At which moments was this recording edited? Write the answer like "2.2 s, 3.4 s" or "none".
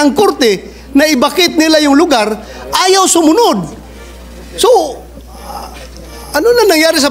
none